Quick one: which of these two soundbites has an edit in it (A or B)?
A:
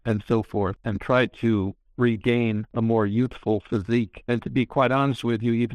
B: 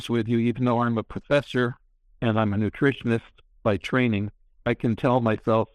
A